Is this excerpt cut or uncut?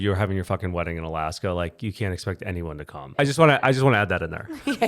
cut